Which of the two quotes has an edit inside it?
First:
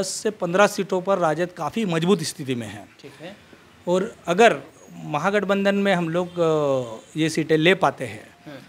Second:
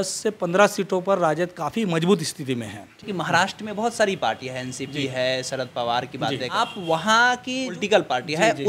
second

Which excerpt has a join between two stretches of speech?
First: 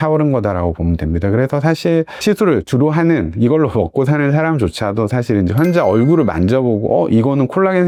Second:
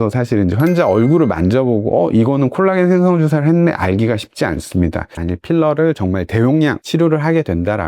second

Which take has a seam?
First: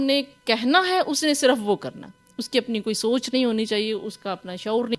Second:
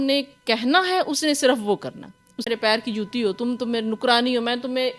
second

